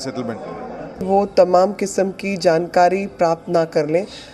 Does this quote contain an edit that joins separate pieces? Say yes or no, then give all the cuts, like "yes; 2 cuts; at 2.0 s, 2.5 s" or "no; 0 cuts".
yes; 1 cut; at 1.0 s